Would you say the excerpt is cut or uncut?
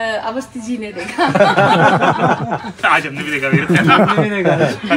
uncut